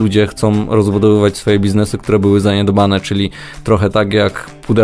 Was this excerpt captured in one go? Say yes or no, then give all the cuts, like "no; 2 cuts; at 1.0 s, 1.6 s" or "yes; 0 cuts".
yes; 0 cuts